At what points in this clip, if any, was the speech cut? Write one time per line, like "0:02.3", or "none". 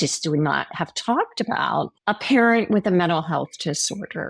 0:01.9